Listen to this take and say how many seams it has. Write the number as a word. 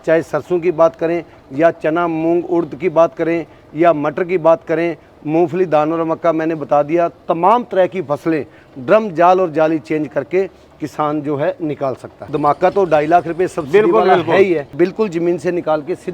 two